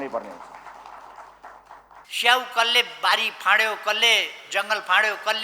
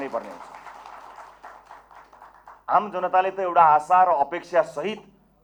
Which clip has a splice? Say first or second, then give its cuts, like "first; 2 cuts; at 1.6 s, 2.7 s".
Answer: first; 1 cut; at 2.1 s